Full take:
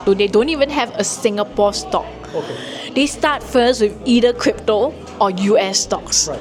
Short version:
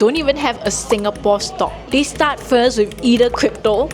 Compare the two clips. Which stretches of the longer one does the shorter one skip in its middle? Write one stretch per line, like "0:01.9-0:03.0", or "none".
0:02.1-0:02.8